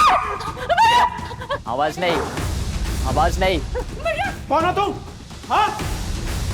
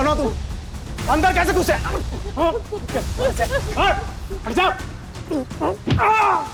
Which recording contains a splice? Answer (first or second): first